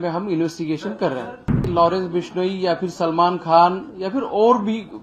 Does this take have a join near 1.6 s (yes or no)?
yes